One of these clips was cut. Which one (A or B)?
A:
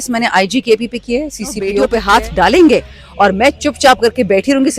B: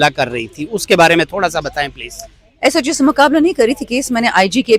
A